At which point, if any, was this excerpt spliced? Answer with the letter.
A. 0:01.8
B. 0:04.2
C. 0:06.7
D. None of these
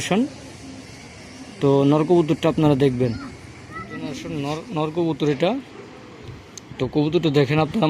B